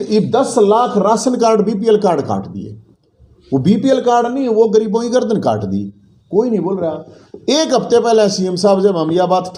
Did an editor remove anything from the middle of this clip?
no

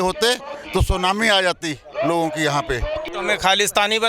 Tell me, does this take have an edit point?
yes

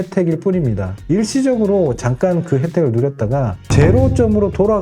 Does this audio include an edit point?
yes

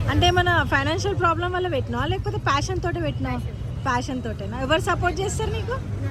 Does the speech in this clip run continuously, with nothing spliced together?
yes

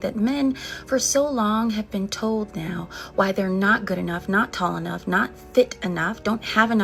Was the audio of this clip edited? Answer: no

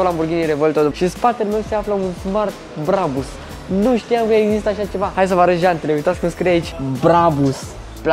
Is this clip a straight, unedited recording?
no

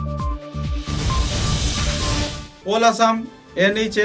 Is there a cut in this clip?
no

